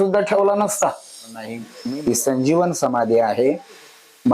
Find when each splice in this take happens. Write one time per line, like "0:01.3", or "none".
0:01.6